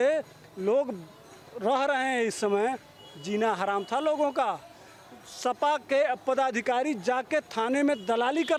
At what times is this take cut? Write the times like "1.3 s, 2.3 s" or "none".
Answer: none